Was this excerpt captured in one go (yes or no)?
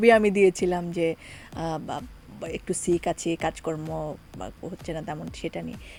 yes